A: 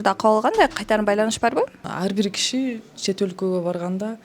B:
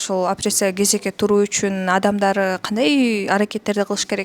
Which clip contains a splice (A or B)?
A